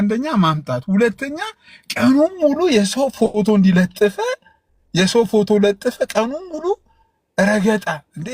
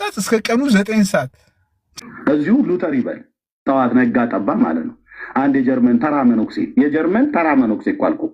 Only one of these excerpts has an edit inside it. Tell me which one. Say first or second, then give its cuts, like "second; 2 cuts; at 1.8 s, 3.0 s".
second; 1 cut; at 2.0 s